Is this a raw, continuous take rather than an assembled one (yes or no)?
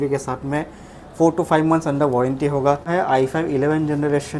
no